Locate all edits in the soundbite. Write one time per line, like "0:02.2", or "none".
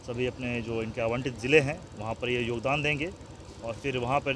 none